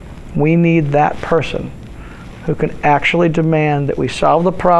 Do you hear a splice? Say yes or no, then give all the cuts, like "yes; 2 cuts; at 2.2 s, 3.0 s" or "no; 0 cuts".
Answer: no; 0 cuts